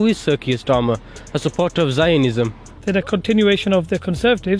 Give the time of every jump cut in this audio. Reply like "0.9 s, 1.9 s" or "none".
2.7 s